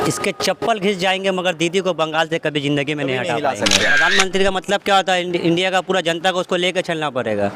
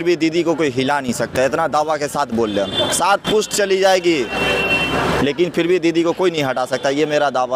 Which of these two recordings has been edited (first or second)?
first